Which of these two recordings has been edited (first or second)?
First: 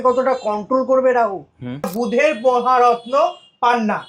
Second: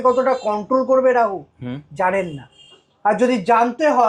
first